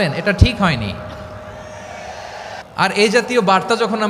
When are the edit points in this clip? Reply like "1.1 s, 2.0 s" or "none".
2.6 s